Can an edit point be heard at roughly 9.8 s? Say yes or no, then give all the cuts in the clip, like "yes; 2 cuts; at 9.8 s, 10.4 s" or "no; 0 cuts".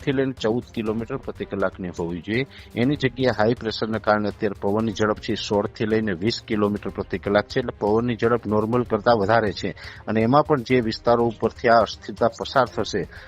no; 0 cuts